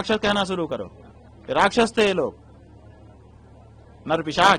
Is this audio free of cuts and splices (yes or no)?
yes